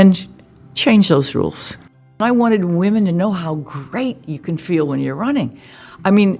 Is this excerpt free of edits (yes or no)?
no